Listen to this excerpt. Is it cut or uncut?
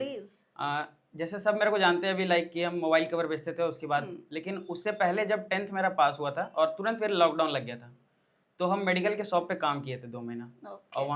uncut